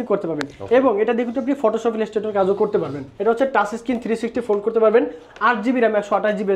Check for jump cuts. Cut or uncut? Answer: cut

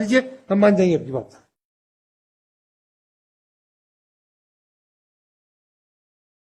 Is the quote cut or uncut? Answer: uncut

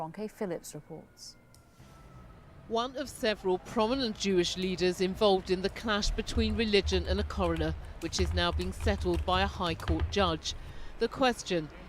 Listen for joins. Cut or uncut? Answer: cut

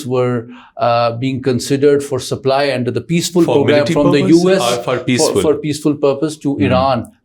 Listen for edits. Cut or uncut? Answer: uncut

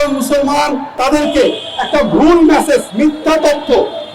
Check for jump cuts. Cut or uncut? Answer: cut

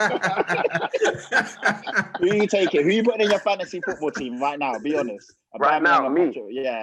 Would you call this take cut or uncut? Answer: uncut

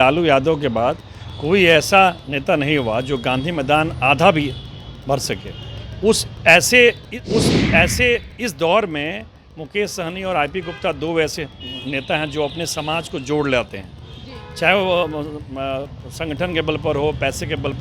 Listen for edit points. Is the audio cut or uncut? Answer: cut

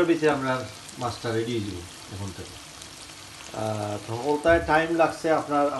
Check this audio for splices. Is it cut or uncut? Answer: uncut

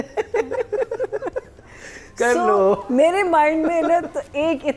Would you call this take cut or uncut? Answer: uncut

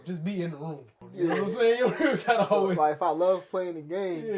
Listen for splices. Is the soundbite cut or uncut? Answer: cut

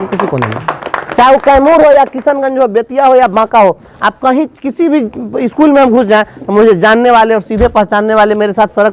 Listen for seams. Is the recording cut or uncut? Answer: uncut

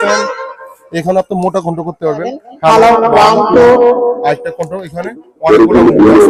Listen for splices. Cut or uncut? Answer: uncut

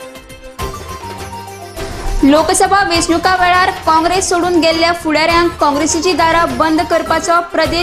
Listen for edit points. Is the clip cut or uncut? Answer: cut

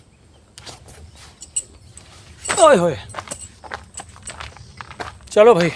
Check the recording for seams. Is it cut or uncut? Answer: uncut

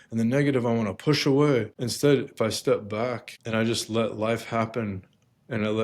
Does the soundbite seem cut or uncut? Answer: cut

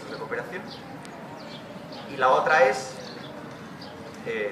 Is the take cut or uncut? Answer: cut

